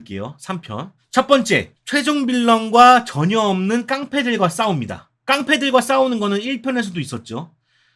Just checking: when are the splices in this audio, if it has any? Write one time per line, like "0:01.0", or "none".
none